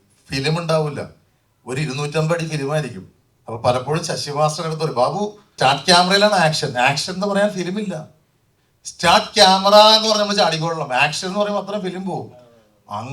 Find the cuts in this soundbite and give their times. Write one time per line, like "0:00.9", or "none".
0:05.5